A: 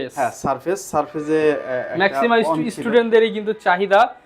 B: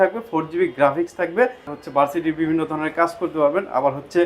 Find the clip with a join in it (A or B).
B